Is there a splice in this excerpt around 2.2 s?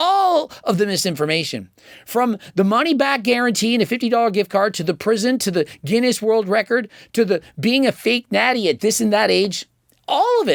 no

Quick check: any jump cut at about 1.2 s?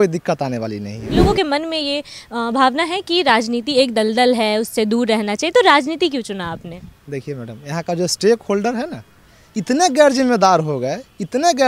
yes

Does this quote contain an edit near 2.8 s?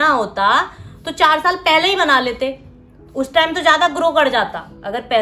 no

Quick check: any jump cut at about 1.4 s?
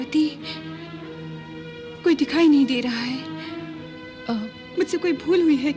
no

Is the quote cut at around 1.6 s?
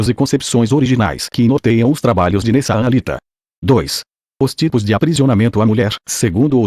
no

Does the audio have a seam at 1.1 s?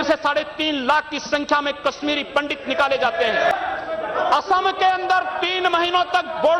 no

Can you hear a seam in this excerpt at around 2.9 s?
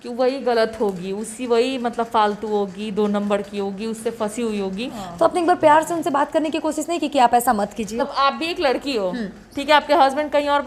no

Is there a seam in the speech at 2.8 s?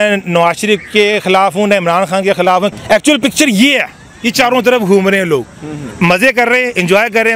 yes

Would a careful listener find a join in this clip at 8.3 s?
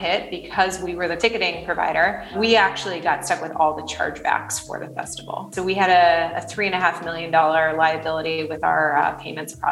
no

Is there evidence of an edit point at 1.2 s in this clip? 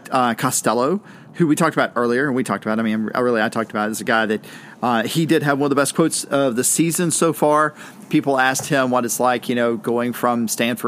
yes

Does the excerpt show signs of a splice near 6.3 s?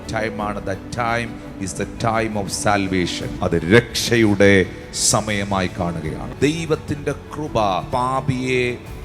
yes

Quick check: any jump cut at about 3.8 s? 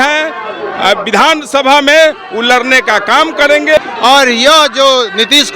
yes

